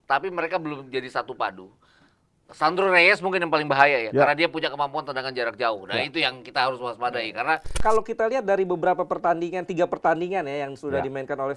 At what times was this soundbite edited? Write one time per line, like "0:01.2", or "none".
0:07.8